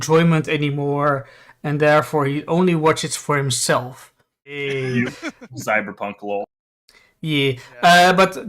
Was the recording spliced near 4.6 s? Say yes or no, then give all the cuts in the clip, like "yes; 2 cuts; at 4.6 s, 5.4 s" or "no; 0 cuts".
yes; 1 cut; at 4.6 s